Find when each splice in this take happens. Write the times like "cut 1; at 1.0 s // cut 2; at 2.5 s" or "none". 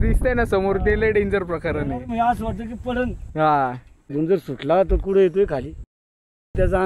none

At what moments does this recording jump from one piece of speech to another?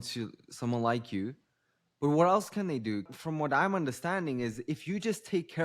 cut 1; at 3.1 s

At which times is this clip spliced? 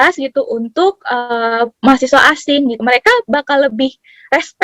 cut 1; at 2.8 s

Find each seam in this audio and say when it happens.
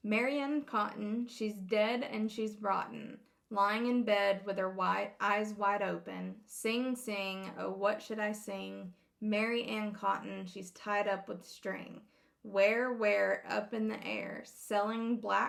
none

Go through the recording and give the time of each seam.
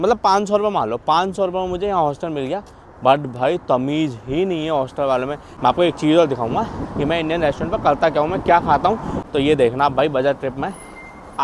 cut 1; at 5.4 s // cut 2; at 9.2 s

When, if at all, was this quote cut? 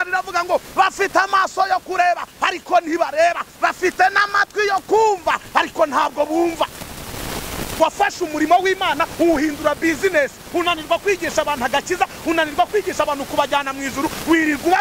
cut 1; at 7.7 s

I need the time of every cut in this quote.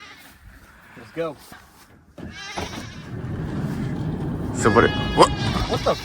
cut 1; at 1.4 s

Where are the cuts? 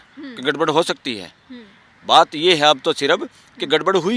none

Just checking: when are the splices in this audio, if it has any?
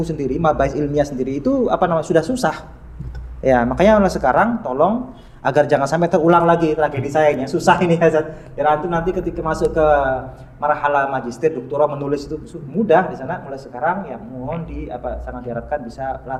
none

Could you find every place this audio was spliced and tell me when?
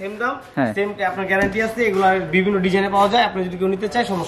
none

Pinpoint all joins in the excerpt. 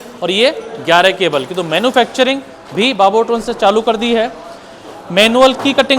none

